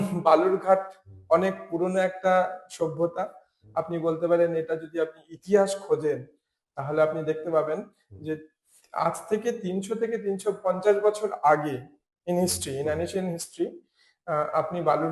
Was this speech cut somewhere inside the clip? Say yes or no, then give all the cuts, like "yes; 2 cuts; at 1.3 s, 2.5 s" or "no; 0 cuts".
no; 0 cuts